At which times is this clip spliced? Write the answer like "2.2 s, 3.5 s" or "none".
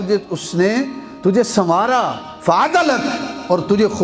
2.2 s